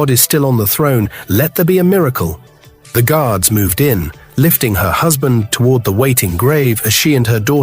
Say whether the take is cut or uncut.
cut